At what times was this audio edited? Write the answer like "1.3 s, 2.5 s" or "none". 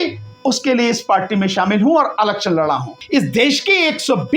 3.0 s